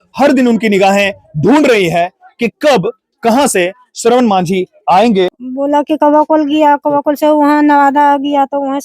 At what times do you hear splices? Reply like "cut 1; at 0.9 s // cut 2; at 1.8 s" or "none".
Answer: cut 1; at 5.4 s